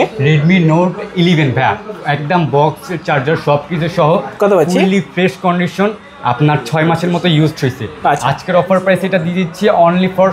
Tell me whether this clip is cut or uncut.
uncut